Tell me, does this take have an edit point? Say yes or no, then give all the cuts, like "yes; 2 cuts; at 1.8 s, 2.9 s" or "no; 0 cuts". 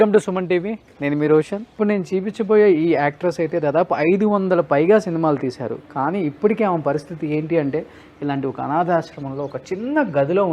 yes; 1 cut; at 1.7 s